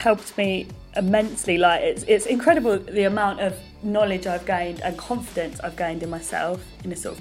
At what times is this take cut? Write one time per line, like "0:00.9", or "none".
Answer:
0:03.7

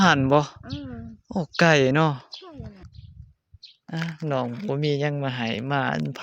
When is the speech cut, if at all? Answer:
0:02.9

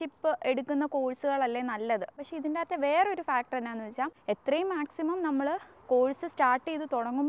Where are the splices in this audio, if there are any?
0:02.1
0:04.2

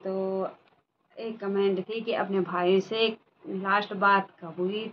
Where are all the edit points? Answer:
none

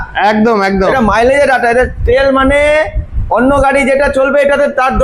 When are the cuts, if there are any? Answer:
none

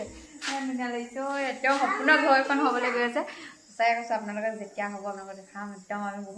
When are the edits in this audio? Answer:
none

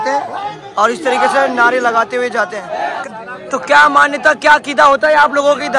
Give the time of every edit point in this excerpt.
0:03.1

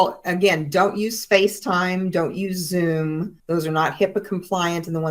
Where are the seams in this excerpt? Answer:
0:03.3

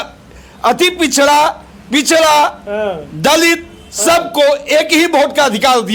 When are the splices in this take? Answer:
none

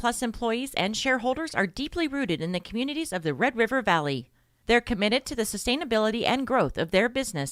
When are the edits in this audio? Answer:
none

